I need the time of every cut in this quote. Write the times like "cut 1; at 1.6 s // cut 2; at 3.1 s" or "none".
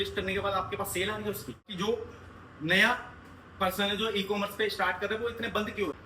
cut 1; at 1.7 s

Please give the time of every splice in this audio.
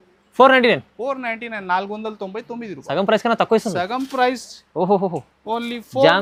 none

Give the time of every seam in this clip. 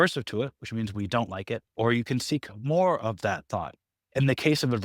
cut 1; at 1.7 s

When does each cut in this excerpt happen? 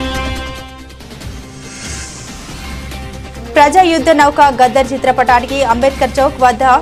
none

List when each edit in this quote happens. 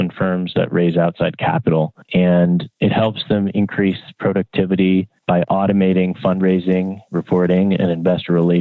none

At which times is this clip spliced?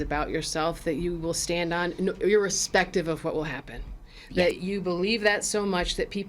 cut 1; at 4.6 s

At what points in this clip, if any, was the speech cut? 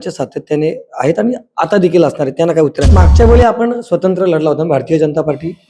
cut 1; at 2.9 s

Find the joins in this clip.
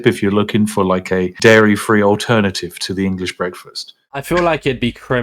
cut 1; at 4.0 s

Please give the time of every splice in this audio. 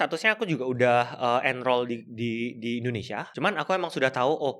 cut 1; at 3.2 s

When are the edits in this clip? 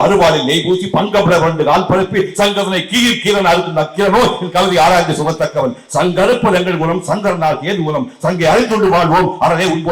none

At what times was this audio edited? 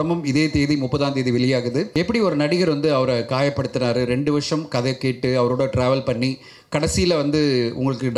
cut 1; at 1.9 s

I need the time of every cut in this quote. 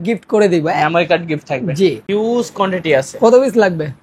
cut 1; at 2.0 s

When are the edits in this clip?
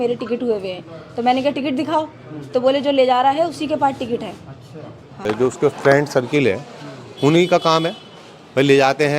cut 1; at 5.2 s

